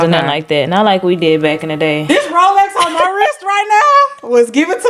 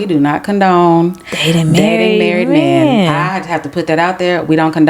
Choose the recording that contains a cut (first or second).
first